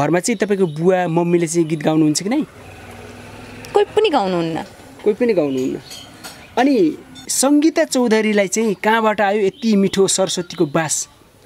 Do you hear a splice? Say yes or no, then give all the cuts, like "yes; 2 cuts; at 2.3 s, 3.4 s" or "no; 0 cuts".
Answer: no; 0 cuts